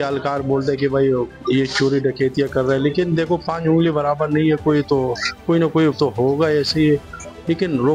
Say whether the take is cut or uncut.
uncut